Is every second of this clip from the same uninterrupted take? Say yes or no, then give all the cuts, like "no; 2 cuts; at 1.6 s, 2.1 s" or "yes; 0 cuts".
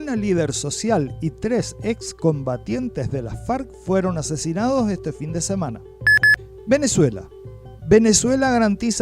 no; 1 cut; at 5.9 s